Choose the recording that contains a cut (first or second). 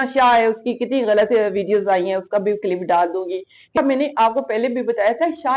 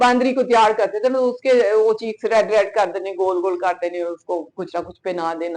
first